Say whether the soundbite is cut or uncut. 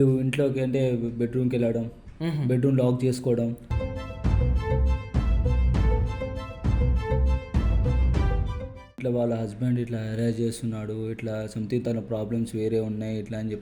cut